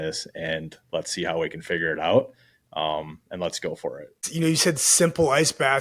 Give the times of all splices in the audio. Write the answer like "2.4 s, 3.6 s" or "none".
4.2 s